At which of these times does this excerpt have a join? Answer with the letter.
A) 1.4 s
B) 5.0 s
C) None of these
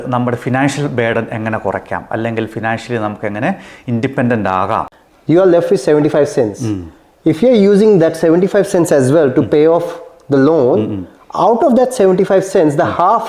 B